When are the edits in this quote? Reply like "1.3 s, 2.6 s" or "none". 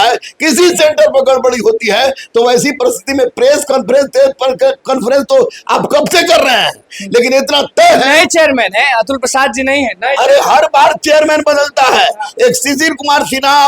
none